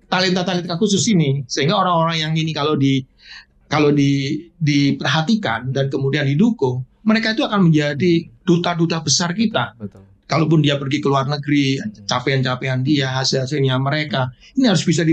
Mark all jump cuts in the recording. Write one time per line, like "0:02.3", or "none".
none